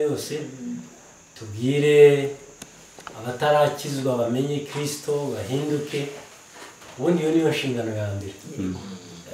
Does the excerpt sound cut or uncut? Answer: uncut